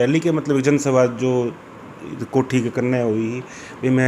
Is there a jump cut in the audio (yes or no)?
no